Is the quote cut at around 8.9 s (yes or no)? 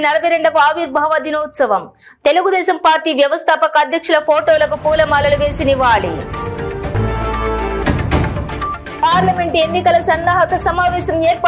yes